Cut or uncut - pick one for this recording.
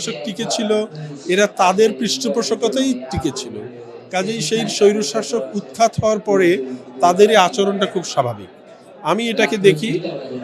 uncut